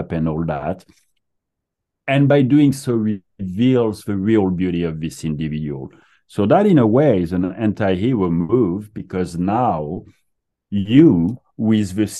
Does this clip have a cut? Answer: no; 0 cuts

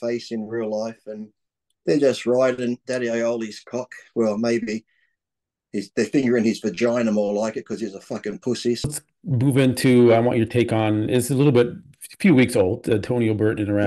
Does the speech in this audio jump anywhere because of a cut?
yes; 1 cut; at 8.9 s

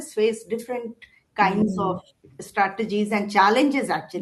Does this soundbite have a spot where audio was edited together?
no; 0 cuts

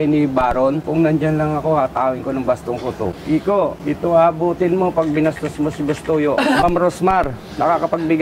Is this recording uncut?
no; 4 cuts; at 0.8 s, 3.1 s, 3.8 s, 6.6 s

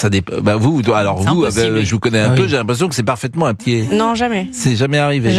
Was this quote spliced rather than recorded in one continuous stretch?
yes; 1 cut; at 3.6 s

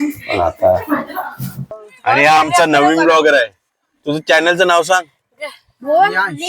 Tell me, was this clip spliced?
yes; 1 cut; at 1.7 s

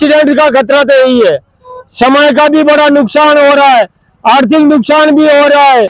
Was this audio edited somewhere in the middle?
no; 0 cuts

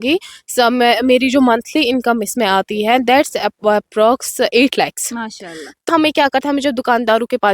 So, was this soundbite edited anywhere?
yes; 1 cut; at 5.9 s

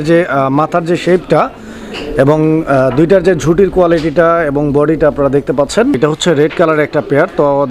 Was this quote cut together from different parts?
yes; 1 cut; at 6.0 s

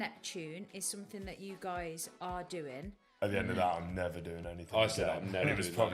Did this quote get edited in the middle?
yes; 1 cut; at 3.1 s

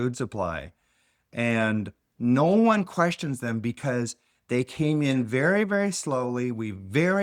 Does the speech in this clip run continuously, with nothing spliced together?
yes; 0 cuts

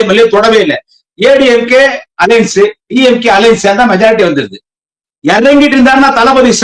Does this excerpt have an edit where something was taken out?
no; 0 cuts

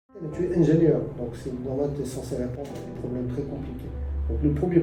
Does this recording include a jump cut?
no; 0 cuts

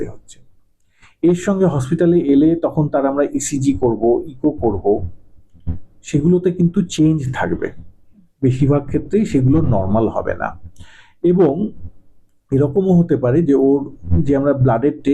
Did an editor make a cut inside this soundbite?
no; 0 cuts

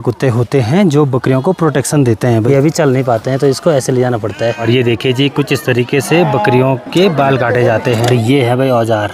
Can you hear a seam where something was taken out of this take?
yes; 3 cuts; at 2.4 s, 4.6 s, 8.0 s

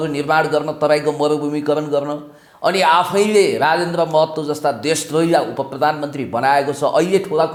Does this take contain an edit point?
no; 0 cuts

